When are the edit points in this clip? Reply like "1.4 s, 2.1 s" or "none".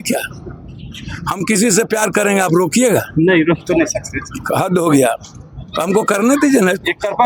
none